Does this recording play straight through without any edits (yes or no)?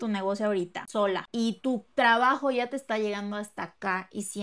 no